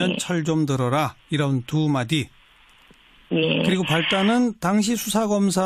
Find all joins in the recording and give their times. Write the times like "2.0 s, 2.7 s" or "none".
3.3 s